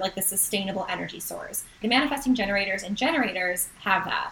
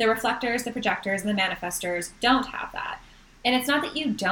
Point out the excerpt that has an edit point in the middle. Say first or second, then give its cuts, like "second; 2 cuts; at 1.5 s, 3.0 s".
first; 1 cut; at 1.8 s